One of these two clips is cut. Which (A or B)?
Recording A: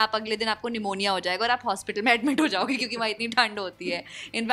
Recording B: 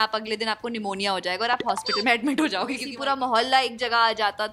B